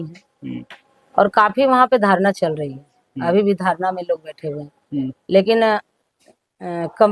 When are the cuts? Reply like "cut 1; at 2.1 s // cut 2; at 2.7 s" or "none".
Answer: none

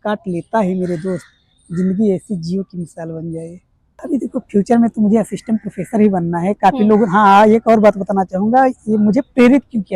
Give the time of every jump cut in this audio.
cut 1; at 4.0 s

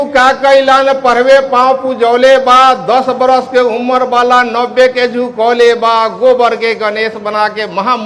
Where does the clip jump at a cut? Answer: none

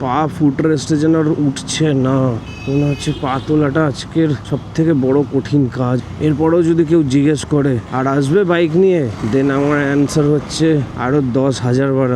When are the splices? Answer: cut 1; at 2.5 s // cut 2; at 4.5 s // cut 3; at 6.0 s // cut 4; at 7.9 s // cut 5; at 9.2 s // cut 6; at 10.9 s

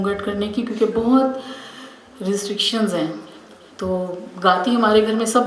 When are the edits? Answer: none

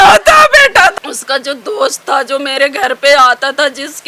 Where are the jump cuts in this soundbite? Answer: cut 1; at 0.9 s

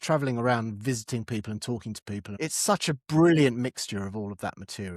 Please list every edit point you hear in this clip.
cut 1; at 2.3 s

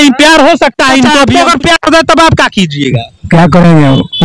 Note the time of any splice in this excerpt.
cut 1; at 1.2 s

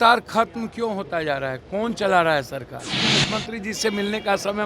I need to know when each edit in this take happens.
cut 1; at 3.0 s

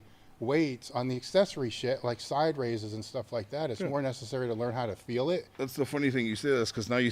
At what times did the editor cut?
cut 1; at 5.5 s

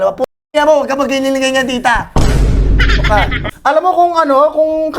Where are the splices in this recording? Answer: cut 1; at 3.4 s

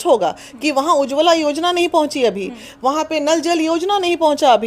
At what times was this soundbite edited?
none

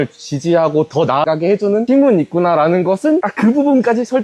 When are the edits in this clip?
cut 1; at 1.7 s // cut 2; at 3.3 s

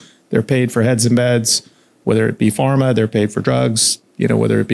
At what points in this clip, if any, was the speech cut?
none

